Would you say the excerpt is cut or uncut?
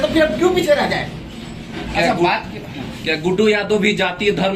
uncut